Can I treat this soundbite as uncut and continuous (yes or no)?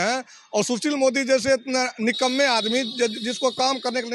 yes